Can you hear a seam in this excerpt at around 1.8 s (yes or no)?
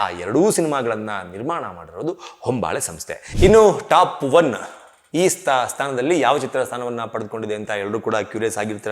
no